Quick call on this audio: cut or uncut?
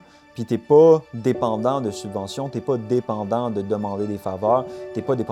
uncut